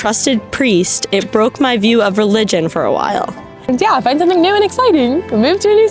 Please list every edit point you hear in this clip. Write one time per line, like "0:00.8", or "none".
0:03.7

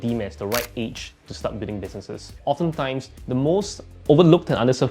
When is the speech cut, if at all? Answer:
0:02.4
0:03.1

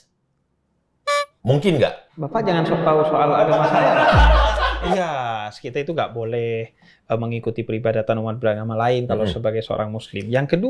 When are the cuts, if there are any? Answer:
0:04.8

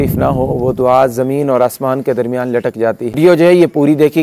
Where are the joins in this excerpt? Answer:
0:03.2

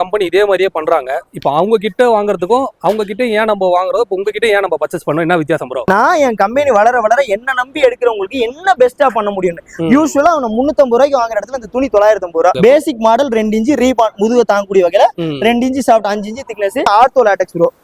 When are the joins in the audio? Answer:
0:05.9
0:12.6
0:16.9

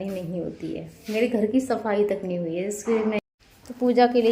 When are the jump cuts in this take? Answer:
0:03.2

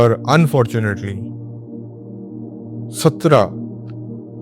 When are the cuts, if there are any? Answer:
0:00.9
0:02.9

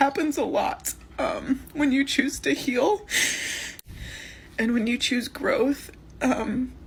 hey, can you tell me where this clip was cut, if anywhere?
none

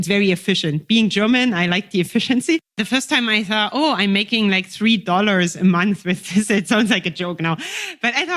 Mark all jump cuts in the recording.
0:02.8

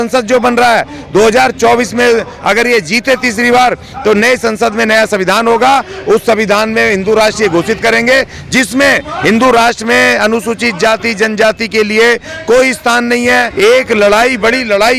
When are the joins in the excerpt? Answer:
0:13.5

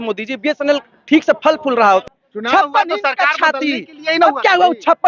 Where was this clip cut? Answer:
0:02.0

